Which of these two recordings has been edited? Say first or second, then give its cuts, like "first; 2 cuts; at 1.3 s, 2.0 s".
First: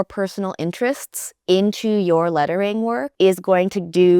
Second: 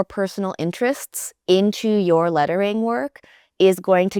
first; 1 cut; at 3.1 s